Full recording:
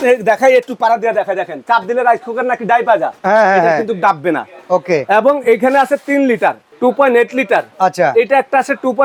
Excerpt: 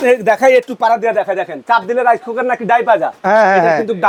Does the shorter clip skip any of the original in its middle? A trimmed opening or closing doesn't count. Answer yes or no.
no